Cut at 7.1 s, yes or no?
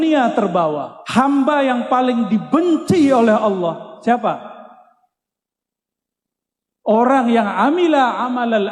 no